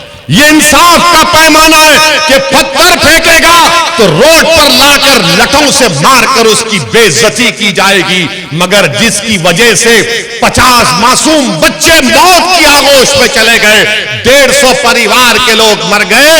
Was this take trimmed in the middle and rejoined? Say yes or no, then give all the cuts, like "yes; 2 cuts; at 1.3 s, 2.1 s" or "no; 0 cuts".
no; 0 cuts